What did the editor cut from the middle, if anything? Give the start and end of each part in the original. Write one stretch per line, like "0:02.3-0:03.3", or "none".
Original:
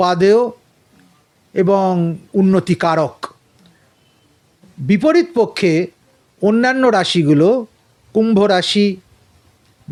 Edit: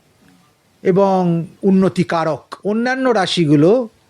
0:03.2-0:06.3